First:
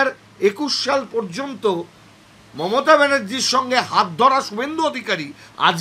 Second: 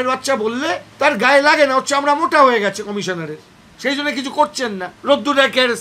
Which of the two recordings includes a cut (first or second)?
second